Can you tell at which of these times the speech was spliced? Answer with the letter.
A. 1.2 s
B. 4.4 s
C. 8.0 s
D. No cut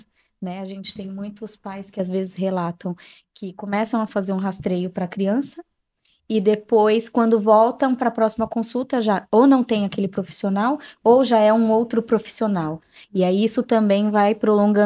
D